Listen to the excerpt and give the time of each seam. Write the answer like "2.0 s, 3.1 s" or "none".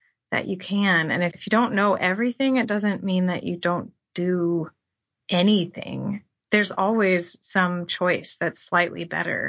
1.3 s